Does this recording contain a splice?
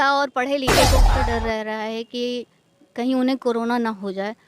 yes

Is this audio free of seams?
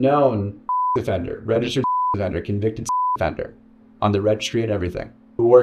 no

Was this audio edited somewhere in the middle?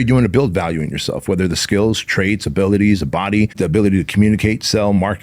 yes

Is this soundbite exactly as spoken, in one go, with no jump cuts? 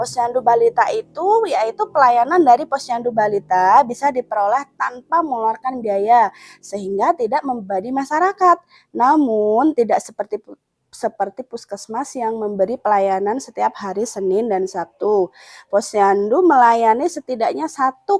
yes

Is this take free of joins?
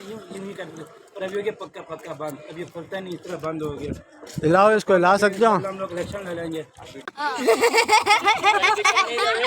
no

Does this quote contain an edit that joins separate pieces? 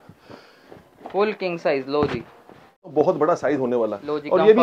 yes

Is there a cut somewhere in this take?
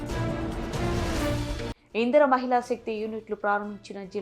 yes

